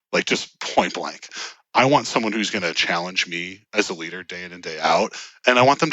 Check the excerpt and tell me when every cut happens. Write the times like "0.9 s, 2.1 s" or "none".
none